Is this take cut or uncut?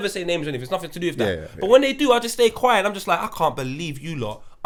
uncut